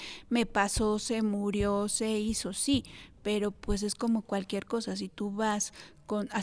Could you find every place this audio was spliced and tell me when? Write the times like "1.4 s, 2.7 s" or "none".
none

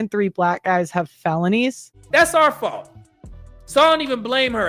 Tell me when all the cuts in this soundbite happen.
1.9 s

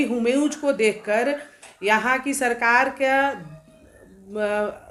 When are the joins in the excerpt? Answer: none

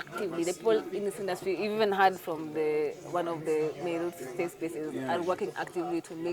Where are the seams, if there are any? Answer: none

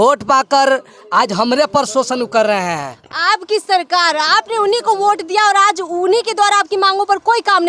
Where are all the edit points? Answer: none

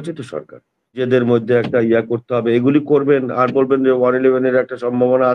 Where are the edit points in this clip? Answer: 1.0 s

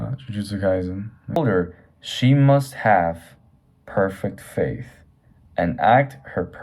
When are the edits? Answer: 1.4 s

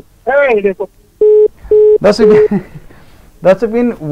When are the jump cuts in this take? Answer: none

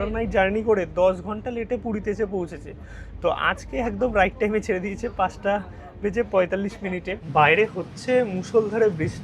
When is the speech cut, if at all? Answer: 7.2 s

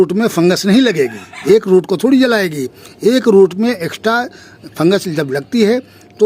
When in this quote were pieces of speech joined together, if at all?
1.3 s

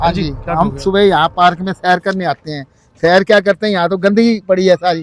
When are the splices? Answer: none

